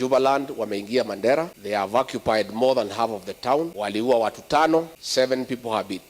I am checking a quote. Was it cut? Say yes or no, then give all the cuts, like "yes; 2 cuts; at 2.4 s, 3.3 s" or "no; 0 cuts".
yes; 3 cuts; at 1.6 s, 3.7 s, 5.0 s